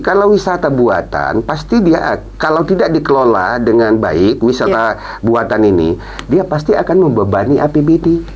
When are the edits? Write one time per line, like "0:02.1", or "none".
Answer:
none